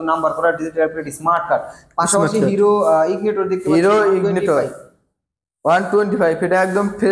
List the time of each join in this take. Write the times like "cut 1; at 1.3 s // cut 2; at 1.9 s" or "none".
none